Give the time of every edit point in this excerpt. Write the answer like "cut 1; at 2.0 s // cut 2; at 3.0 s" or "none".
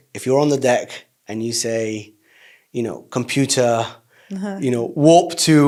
none

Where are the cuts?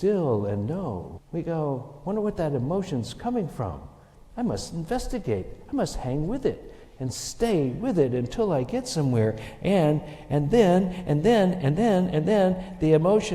cut 1; at 1.1 s

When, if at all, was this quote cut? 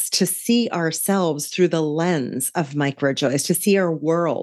none

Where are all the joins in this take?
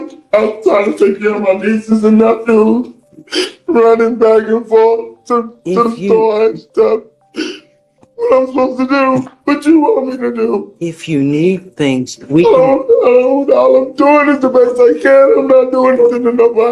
none

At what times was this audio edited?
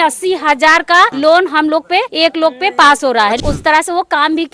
cut 1; at 1.1 s // cut 2; at 2.1 s // cut 3; at 3.4 s

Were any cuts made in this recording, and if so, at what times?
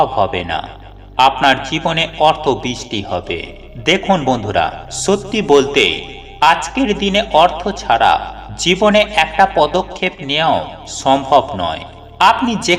none

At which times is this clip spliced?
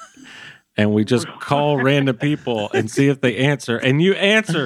none

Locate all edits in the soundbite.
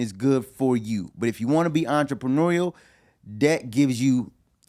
none

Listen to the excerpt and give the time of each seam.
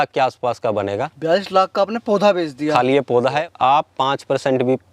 cut 1; at 3.4 s

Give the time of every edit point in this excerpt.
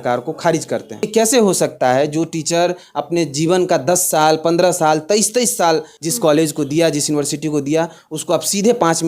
cut 1; at 1.1 s // cut 2; at 5.9 s

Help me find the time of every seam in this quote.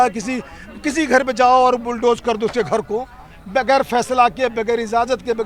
none

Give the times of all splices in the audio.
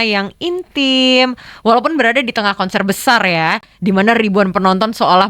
none

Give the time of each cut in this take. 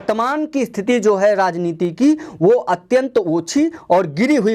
none

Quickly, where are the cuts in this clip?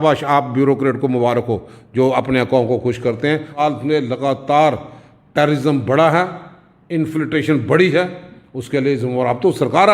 cut 1; at 3.5 s

